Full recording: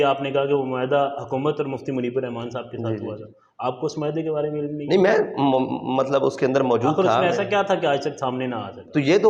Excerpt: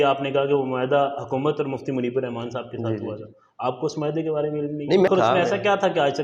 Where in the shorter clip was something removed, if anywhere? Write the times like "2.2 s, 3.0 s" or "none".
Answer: 5.1 s